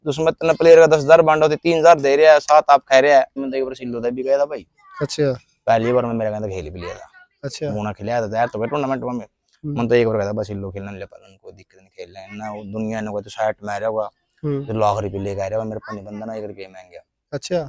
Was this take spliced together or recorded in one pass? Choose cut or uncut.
cut